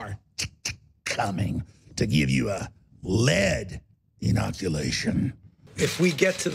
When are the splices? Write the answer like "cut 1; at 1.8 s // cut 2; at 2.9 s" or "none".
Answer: cut 1; at 5.6 s

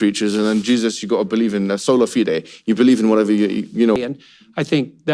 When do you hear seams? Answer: cut 1; at 3.9 s

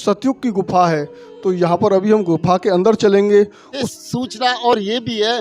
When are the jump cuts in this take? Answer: cut 1; at 3.9 s

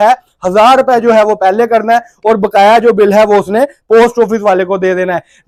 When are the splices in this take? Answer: none

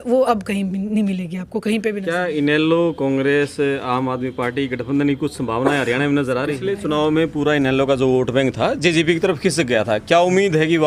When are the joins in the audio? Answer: cut 1; at 2.0 s // cut 2; at 6.6 s

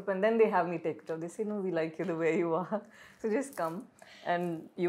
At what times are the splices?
none

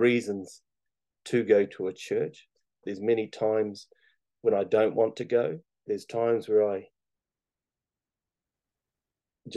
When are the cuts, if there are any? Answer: cut 1; at 2.8 s // cut 2; at 5.8 s

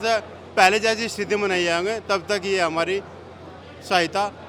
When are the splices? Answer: none

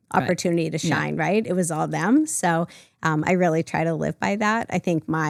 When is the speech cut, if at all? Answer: none

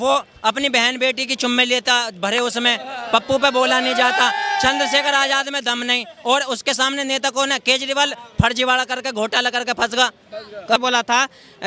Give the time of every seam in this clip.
cut 1; at 10.8 s

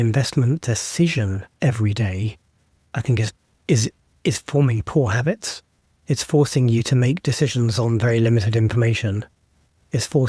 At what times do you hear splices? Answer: none

